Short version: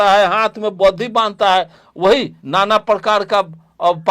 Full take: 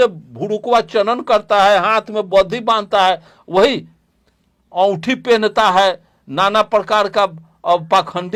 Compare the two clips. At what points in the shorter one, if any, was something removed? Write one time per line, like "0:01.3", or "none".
0:02.4